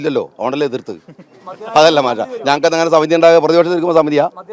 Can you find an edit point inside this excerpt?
no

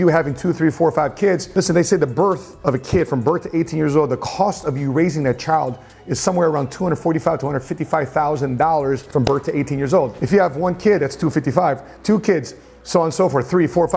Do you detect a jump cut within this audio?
no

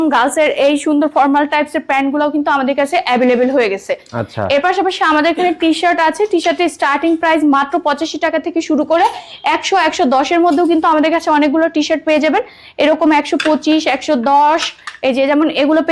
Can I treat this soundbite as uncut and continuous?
yes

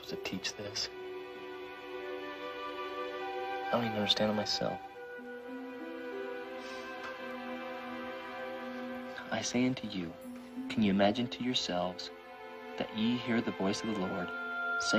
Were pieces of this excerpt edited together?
yes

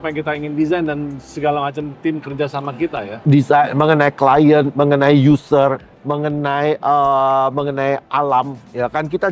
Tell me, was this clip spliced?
no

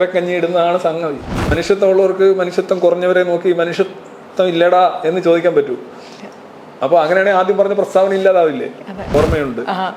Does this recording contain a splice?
yes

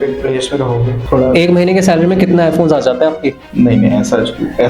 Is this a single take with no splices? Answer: no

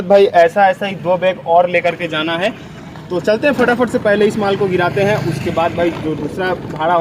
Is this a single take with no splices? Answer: yes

